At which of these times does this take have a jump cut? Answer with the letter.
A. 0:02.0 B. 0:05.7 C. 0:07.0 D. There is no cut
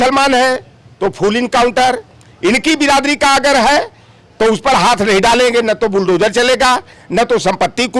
D